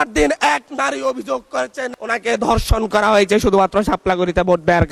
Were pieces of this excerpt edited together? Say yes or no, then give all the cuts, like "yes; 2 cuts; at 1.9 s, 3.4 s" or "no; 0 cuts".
no; 0 cuts